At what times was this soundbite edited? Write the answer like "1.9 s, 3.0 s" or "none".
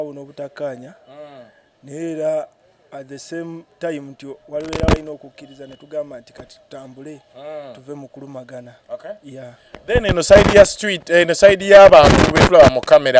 none